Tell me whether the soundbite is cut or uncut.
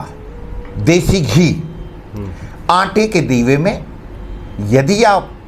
uncut